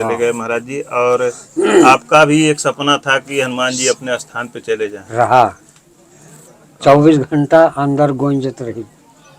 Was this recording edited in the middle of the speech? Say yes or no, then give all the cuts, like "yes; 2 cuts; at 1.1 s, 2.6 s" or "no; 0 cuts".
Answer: no; 0 cuts